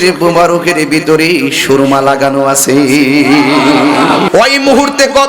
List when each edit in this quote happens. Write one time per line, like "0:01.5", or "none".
0:04.3